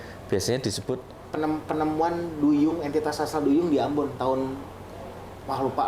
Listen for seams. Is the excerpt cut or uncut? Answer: cut